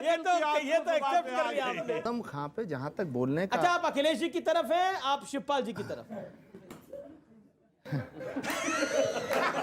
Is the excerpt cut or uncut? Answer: cut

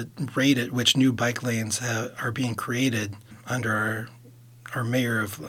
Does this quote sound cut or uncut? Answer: cut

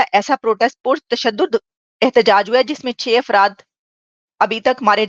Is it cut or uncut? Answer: uncut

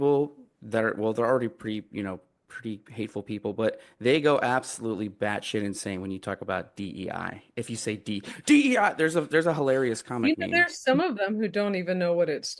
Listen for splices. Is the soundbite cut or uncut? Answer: uncut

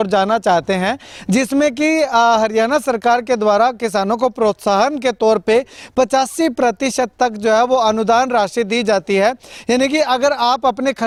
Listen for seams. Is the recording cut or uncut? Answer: uncut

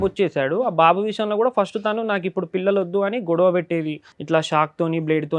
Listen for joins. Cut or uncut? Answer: uncut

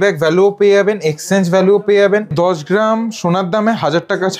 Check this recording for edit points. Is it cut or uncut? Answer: cut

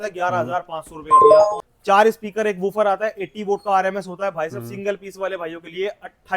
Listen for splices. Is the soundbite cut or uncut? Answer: cut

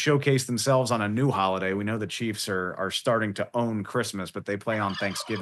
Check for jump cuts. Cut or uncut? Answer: uncut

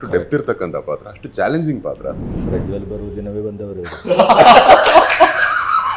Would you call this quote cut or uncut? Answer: cut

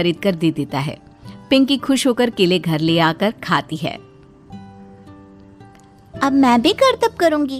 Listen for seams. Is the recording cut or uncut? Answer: uncut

